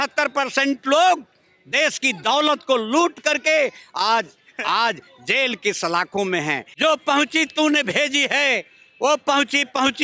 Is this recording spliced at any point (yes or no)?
yes